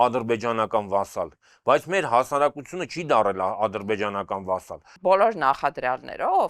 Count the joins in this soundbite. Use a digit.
1